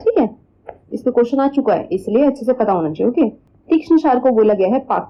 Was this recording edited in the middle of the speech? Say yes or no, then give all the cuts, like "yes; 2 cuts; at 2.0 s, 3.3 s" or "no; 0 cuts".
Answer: no; 0 cuts